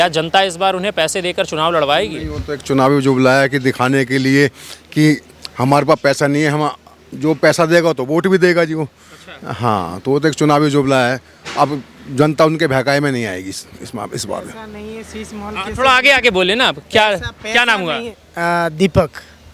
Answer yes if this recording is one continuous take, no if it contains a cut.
yes